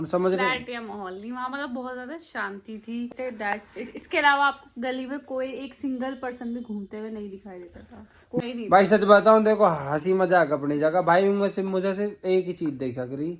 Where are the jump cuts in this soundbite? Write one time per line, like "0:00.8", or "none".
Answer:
0:03.1
0:08.4